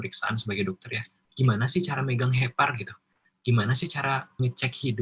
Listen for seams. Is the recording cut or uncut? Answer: cut